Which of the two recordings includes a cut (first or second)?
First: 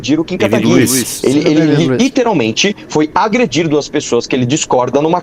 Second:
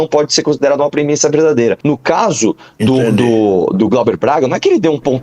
second